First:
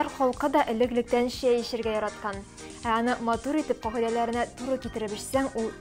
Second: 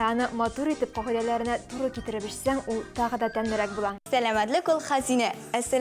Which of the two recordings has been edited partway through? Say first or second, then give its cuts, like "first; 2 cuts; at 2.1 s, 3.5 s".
second; 1 cut; at 4.0 s